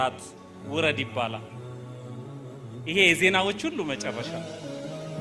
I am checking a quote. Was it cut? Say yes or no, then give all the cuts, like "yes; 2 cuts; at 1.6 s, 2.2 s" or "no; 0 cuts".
yes; 1 cut; at 4.2 s